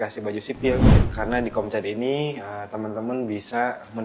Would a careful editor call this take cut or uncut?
cut